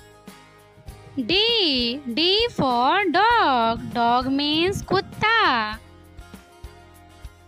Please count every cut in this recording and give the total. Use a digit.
1